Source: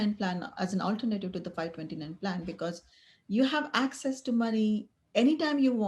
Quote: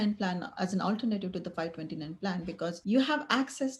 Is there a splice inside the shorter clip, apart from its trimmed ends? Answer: yes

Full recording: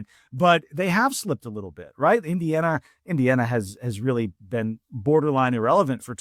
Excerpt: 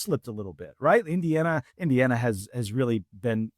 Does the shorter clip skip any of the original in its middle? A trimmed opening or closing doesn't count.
yes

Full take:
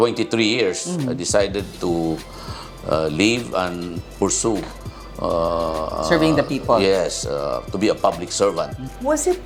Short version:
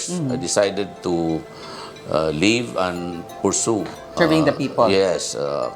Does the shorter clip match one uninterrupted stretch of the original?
no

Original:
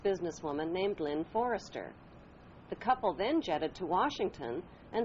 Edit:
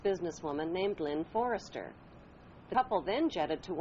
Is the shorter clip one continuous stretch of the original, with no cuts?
no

